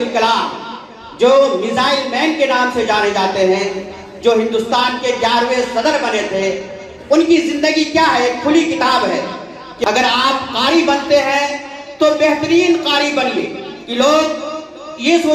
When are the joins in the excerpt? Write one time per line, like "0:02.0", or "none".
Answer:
0:09.8